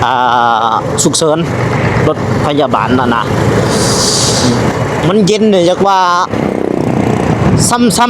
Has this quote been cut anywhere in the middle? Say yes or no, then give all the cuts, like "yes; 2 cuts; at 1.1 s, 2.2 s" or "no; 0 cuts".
yes; 1 cut; at 4.4 s